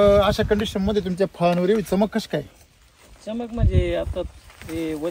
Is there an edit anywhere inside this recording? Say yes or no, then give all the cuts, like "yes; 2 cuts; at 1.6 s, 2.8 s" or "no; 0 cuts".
no; 0 cuts